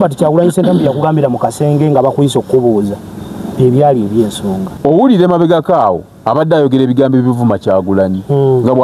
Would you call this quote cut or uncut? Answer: cut